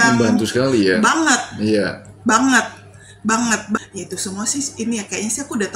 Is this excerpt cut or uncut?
cut